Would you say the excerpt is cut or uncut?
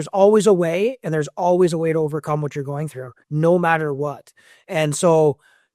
uncut